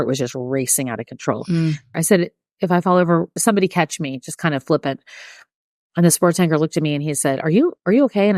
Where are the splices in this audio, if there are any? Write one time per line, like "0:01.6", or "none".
0:01.9
0:03.3